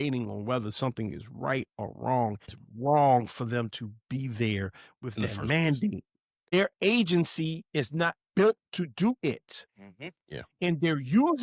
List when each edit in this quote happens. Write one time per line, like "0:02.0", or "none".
0:02.6
0:06.5